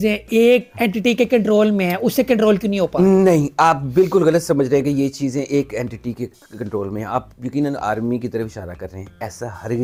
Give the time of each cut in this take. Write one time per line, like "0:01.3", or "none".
none